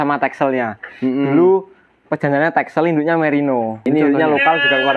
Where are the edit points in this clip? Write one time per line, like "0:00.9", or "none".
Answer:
0:03.8